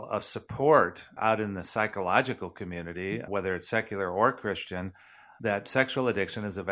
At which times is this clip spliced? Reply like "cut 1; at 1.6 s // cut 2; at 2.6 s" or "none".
cut 1; at 1.1 s // cut 2; at 3.3 s // cut 3; at 5.2 s